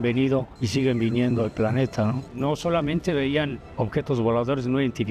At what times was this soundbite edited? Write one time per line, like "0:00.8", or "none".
0:02.2

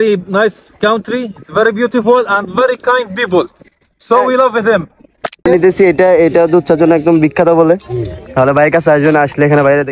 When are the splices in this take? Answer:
0:05.5

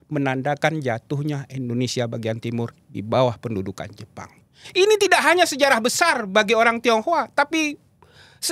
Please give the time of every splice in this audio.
none

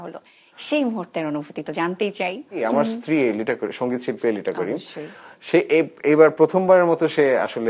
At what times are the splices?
0:02.5

